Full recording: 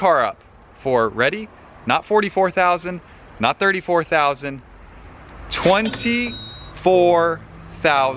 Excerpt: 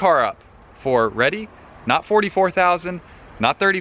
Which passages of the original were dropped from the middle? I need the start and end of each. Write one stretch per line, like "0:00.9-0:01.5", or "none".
none